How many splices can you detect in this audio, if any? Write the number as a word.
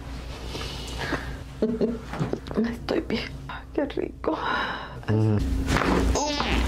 one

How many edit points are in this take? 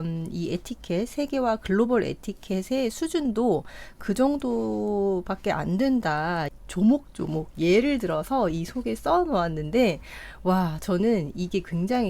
one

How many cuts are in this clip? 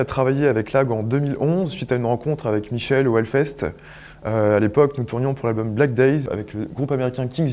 one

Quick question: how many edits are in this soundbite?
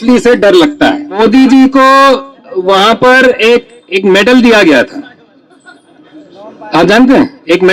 one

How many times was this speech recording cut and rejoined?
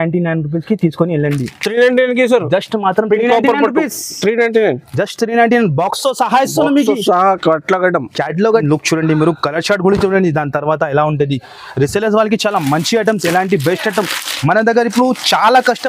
one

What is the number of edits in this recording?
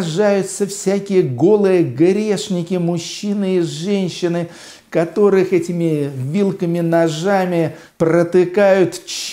one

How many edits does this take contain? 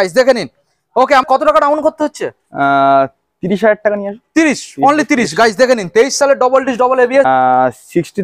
two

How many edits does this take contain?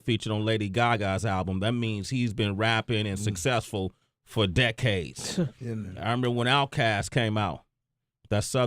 one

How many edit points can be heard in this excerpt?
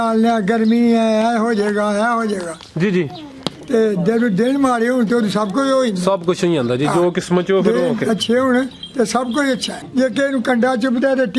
one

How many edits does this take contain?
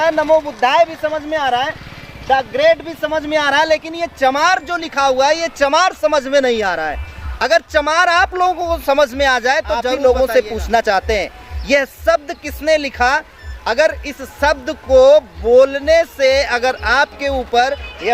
one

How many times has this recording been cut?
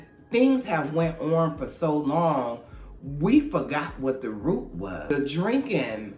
one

